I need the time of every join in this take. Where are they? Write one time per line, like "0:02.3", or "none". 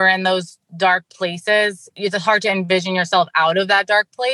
0:01.8